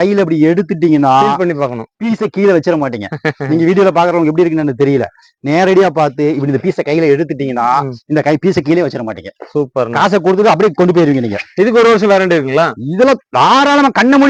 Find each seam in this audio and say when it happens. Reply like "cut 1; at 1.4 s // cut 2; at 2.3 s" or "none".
none